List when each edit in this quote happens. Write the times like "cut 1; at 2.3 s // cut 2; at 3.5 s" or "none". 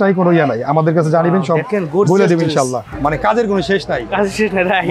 cut 1; at 2.9 s